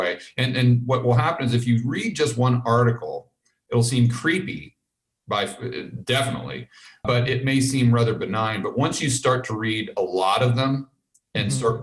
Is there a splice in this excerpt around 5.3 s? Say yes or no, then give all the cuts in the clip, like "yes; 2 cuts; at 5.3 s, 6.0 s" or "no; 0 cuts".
no; 2 cuts; at 3.5 s, 7.0 s